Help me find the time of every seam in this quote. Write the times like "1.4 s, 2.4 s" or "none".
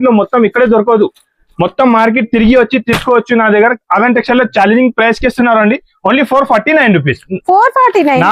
none